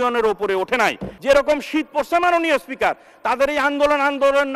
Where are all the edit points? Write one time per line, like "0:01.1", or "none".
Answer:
0:01.1